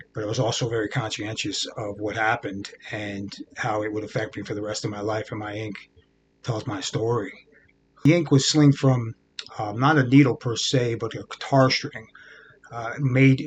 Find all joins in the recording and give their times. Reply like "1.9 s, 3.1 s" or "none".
8.1 s